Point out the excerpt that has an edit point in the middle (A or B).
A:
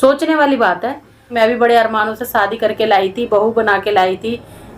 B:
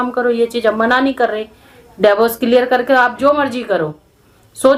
A